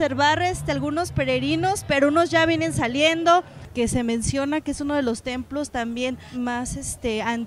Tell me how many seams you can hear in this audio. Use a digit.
2